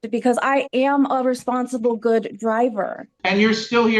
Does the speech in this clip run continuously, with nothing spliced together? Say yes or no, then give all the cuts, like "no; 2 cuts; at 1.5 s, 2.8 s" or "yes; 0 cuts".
no; 1 cut; at 3.1 s